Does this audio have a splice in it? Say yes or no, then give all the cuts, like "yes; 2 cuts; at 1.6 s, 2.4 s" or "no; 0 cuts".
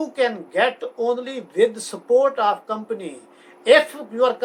no; 0 cuts